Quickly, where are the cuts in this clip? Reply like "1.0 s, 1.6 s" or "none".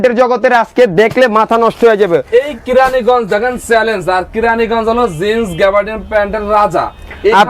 none